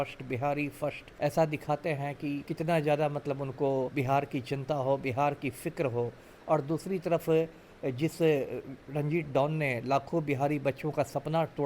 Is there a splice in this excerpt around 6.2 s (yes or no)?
no